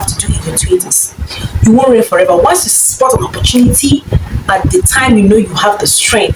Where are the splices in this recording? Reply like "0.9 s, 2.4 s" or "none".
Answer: none

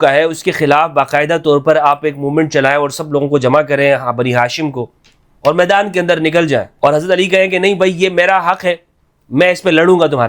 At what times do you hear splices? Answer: 6.7 s

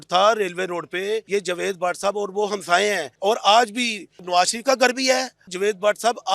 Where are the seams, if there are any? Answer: 1.2 s, 3.1 s, 4.2 s, 5.5 s

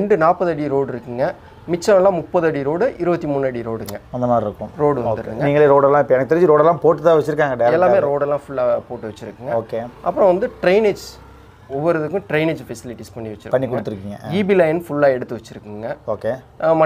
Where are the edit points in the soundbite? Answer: none

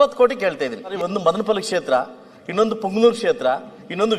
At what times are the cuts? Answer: 0.9 s

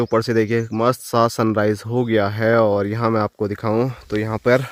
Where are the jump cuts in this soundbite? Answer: none

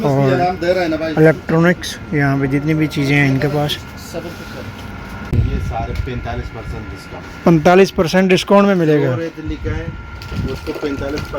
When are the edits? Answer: 5.3 s

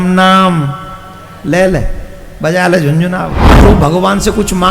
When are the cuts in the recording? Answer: 3.6 s

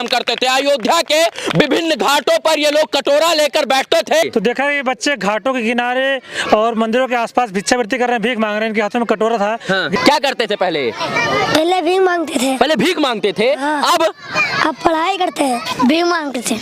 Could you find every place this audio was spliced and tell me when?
4.2 s, 10.0 s, 15.6 s

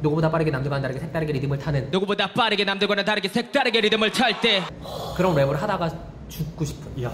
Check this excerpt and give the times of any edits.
none

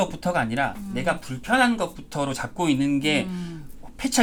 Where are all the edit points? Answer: none

